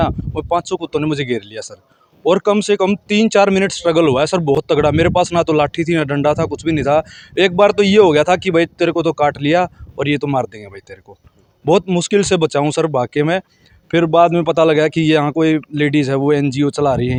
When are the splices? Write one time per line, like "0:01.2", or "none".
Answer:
none